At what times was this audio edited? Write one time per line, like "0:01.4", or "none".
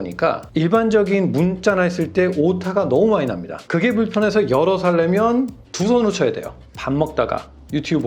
0:03.5
0:06.7